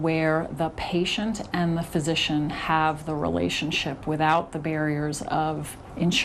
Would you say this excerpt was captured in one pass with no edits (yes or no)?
yes